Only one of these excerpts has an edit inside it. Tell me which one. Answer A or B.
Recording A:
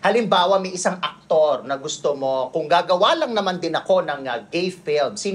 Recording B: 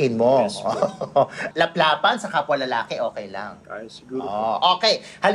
B